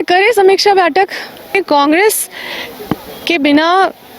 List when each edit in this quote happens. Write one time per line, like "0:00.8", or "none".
0:01.6